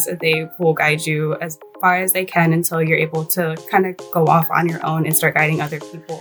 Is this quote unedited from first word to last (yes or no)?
yes